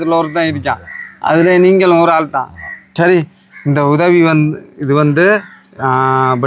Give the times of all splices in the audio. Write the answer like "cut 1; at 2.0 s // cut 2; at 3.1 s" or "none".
cut 1; at 2.8 s